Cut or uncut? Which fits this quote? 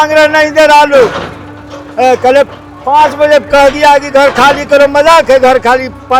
uncut